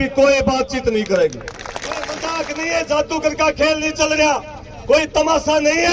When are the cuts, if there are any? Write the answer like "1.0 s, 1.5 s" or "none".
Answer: 2.1 s